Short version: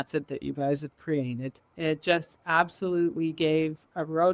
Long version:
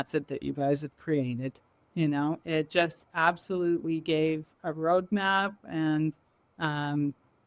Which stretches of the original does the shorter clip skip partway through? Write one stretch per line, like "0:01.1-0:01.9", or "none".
0:01.7-0:02.4

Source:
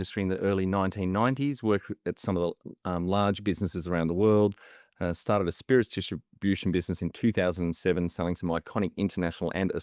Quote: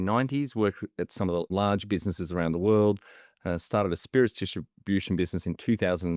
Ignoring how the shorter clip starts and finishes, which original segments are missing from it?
0:02.6-0:03.0

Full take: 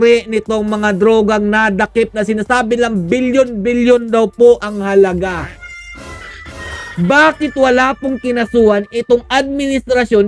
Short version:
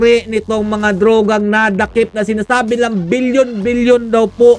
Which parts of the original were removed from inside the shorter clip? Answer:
none

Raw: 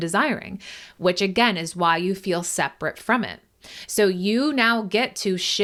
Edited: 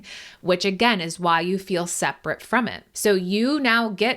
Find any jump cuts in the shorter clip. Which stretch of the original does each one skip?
0:03.4-0:03.8

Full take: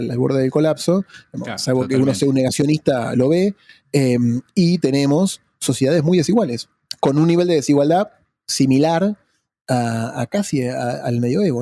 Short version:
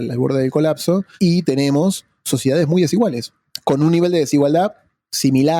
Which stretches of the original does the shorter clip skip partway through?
0:01.1-0:04.5

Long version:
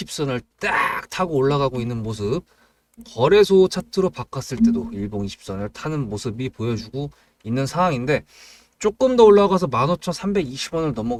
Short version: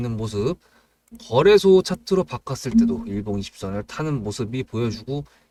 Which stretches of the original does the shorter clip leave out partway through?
none

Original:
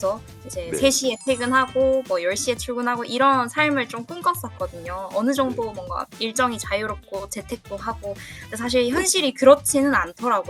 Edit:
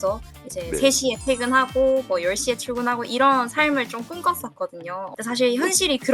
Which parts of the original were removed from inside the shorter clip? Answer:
0:05.1-0:08.4

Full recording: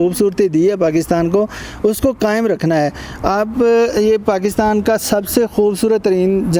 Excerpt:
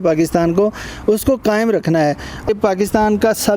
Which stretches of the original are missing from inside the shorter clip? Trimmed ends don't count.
0:03.3-0:04.1

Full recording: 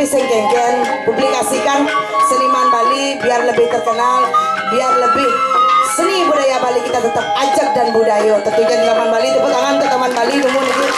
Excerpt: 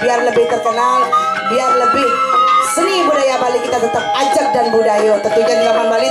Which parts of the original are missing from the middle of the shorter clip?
none

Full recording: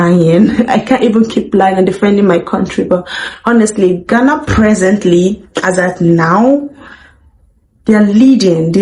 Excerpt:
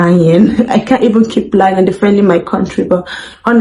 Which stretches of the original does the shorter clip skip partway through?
none

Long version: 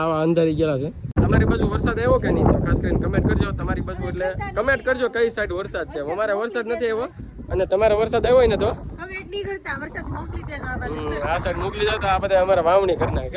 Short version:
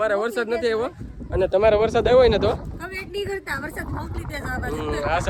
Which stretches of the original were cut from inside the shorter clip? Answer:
none

